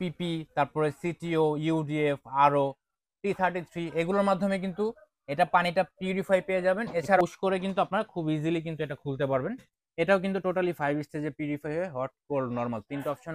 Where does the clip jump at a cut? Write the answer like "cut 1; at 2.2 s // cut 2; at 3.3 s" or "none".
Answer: cut 1; at 7.2 s